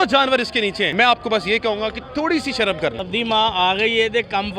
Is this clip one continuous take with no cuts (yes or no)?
no